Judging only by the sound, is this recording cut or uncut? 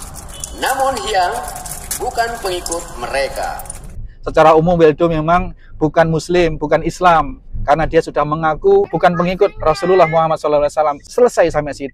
cut